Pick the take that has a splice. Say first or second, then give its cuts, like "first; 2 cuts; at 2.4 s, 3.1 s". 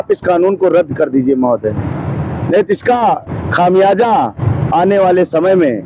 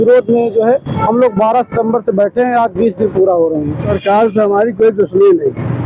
second; 1 cut; at 3.9 s